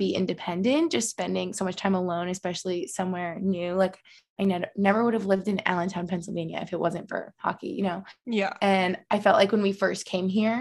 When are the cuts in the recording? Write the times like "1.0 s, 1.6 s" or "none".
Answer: none